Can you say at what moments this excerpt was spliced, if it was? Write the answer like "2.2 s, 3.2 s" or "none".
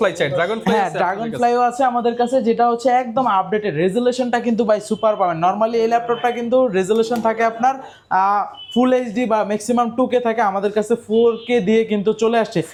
none

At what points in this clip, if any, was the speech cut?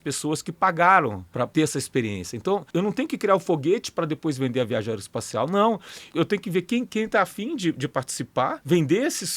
1.4 s, 2.7 s, 6.0 s, 8.6 s

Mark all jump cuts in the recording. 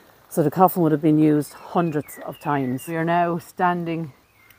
2.9 s

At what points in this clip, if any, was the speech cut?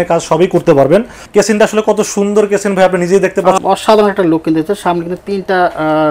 1.2 s, 3.6 s

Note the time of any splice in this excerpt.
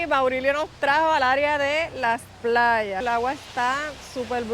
3.0 s

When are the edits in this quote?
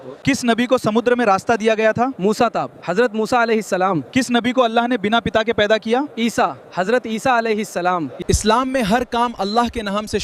8.1 s

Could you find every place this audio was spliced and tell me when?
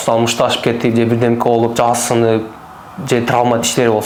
none

